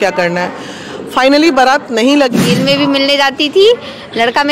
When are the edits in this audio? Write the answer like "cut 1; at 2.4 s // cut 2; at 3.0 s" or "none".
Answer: cut 1; at 2.4 s